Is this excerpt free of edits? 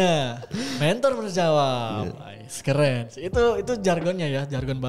yes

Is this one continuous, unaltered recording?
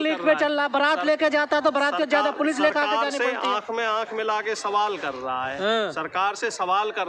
yes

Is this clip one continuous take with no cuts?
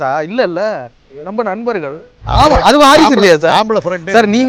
no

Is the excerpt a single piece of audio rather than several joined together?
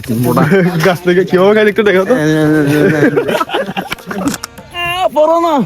no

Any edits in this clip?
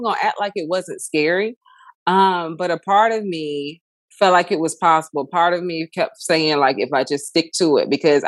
no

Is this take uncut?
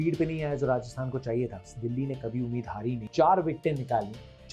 no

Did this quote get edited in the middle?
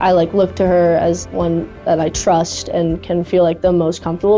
no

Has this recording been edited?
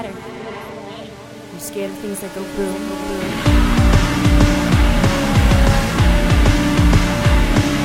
no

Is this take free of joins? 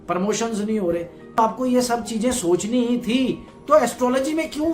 no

